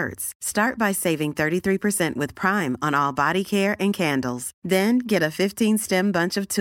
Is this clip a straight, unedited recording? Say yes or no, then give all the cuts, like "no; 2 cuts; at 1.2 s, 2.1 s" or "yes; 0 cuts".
yes; 0 cuts